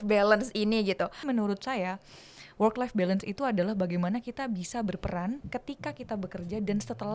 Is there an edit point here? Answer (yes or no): yes